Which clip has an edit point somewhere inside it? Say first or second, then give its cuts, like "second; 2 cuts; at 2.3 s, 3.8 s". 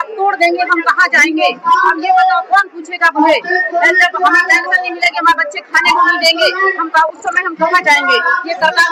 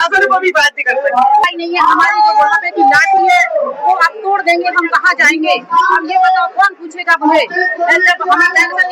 second; 1 cut; at 1.5 s